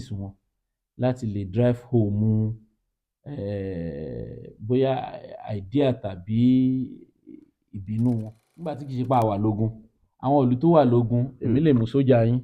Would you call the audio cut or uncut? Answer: cut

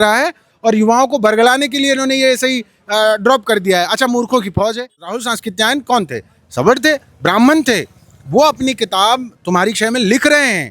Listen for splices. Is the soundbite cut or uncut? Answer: cut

